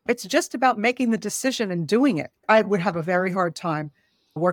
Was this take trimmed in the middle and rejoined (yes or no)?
yes